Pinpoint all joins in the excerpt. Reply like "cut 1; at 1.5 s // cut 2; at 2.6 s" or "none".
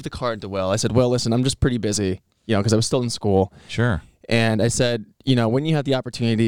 none